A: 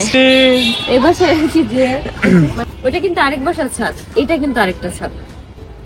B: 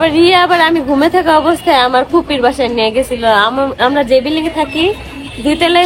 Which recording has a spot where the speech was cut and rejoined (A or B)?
A